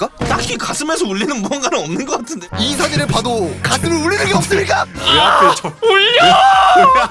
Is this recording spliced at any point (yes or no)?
yes